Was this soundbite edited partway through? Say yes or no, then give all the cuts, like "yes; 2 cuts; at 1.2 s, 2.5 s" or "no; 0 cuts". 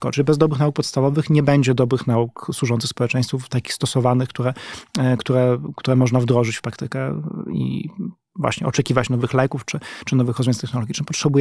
no; 0 cuts